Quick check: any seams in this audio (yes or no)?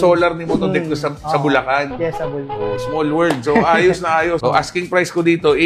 no